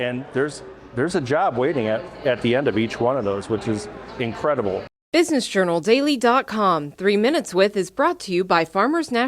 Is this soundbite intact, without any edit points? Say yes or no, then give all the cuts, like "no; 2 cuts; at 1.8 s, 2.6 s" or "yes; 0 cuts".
no; 1 cut; at 4.9 s